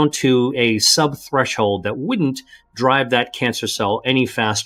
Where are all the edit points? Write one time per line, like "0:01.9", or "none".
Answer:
none